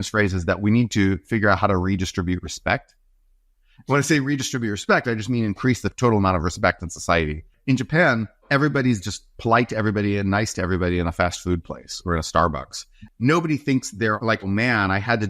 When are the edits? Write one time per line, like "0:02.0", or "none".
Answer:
0:07.5
0:08.4
0:13.0